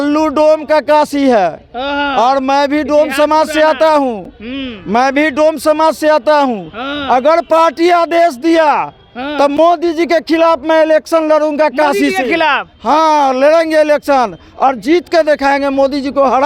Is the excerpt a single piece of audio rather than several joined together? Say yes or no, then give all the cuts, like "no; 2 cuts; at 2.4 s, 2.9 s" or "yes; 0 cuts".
yes; 0 cuts